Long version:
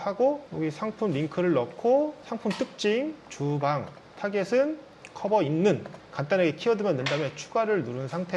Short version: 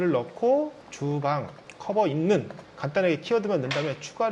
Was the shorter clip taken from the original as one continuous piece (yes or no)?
no